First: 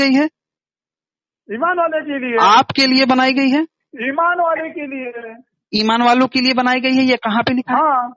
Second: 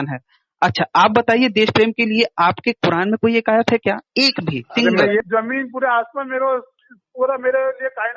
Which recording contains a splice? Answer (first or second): second